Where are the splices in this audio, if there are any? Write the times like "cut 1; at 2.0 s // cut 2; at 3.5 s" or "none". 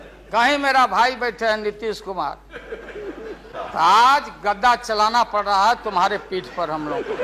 cut 1; at 3.5 s